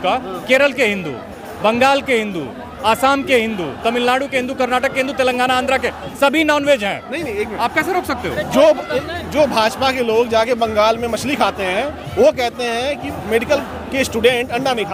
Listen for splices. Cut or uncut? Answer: uncut